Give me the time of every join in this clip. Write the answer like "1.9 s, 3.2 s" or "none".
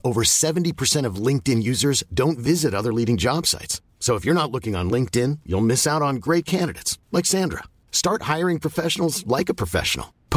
none